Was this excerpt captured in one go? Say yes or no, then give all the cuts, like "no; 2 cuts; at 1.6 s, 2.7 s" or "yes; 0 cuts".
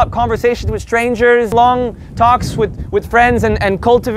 no; 1 cut; at 1.5 s